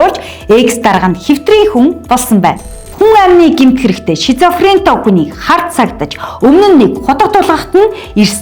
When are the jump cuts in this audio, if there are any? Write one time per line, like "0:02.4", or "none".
0:02.8

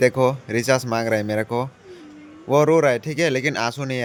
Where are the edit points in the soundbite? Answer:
none

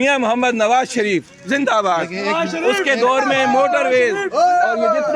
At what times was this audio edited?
none

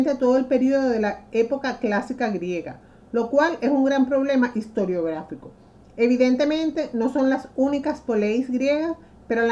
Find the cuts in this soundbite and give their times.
0:07.8

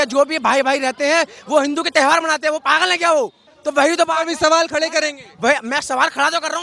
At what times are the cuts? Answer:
none

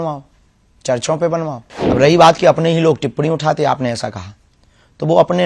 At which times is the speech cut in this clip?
0:01.7

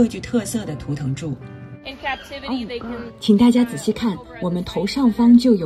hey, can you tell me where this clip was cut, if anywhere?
0:01.9

